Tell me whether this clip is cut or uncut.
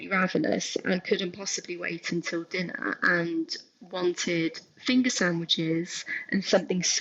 uncut